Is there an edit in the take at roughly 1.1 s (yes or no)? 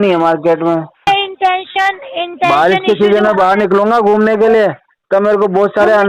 yes